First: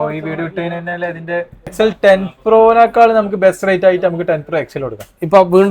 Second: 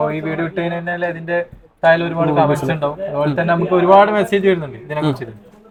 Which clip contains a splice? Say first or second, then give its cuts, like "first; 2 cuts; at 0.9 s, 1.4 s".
first; 1 cut; at 1.6 s